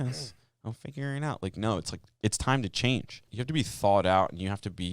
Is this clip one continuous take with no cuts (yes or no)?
no